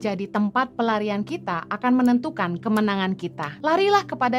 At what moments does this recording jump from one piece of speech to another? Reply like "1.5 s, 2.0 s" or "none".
3.5 s

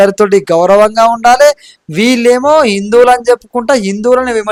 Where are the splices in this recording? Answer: none

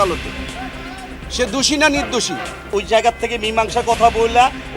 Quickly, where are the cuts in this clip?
2.6 s

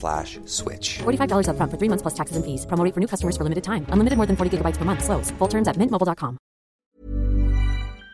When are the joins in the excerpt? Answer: 6.8 s

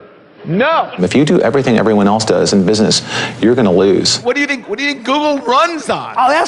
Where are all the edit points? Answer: 1.0 s, 4.2 s

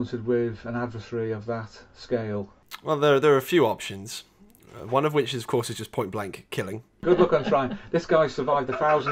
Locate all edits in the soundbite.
2.7 s, 7.0 s

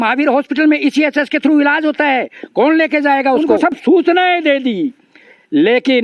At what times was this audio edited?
3.6 s

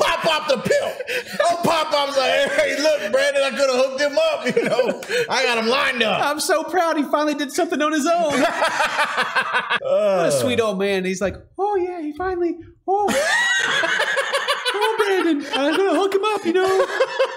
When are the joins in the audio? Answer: 15.4 s

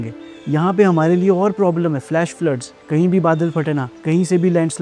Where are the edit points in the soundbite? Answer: 2.7 s, 3.9 s

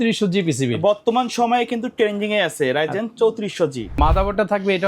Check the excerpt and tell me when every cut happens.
3.8 s

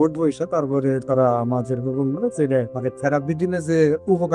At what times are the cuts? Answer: 2.7 s

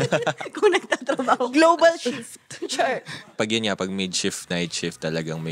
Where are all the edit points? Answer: 3.4 s

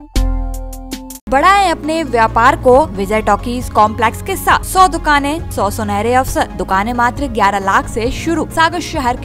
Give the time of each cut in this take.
1.3 s, 3.0 s, 4.7 s, 5.5 s, 6.6 s, 8.5 s

